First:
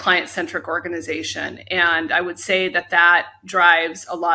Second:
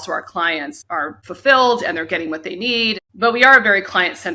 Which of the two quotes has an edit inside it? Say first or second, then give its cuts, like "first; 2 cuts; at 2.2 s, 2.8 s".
second; 2 cuts; at 1.2 s, 3.0 s